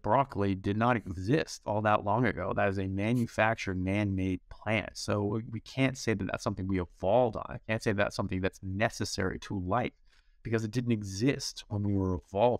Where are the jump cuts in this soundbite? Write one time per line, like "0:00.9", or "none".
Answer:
none